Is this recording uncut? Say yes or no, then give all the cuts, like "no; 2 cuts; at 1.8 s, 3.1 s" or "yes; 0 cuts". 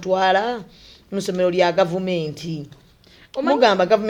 yes; 0 cuts